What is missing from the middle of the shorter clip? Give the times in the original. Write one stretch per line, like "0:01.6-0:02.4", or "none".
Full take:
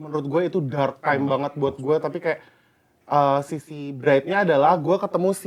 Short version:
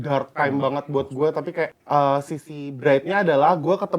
0:02.5-0:03.0